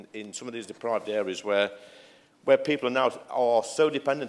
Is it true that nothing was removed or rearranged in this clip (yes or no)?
yes